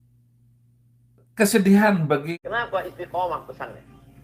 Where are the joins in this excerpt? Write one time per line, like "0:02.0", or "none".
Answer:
0:02.4